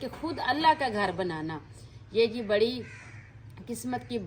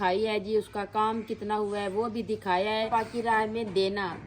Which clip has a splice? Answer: second; 1 cut; at 2.9 s

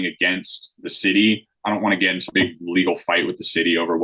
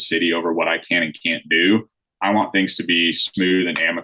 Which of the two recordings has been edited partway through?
first; 1 cut; at 2.3 s

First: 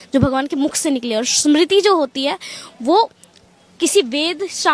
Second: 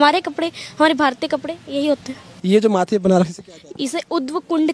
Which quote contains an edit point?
second; 1 cut; at 2.3 s

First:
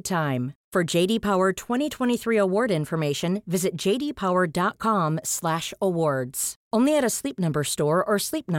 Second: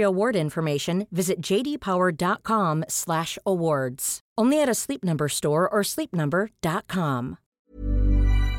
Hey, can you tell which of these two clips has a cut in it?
second; 1 cut; at 7.7 s

